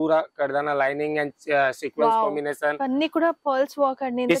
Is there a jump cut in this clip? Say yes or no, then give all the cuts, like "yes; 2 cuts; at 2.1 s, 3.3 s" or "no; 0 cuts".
no; 0 cuts